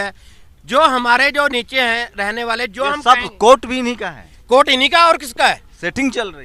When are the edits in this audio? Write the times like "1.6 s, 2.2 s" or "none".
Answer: none